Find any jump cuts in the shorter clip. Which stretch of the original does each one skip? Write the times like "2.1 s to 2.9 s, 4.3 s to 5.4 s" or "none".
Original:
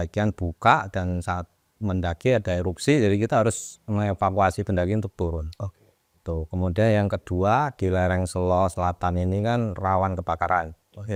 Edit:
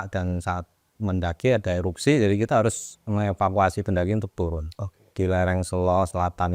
5.9 s to 7.7 s